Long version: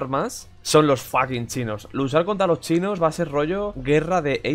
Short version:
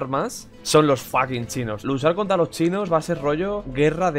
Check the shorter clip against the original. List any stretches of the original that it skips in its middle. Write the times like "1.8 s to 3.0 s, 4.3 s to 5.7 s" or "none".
1.8 s to 1.9 s